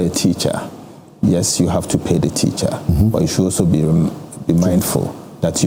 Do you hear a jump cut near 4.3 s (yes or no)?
no